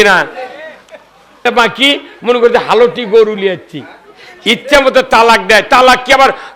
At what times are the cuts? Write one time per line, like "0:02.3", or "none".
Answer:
0:01.5